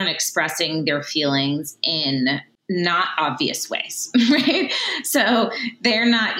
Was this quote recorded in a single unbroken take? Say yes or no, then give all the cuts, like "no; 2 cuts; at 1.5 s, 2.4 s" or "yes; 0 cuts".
no; 1 cut; at 2.5 s